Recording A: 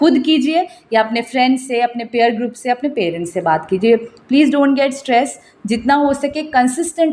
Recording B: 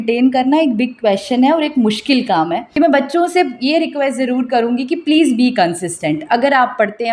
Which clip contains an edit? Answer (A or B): B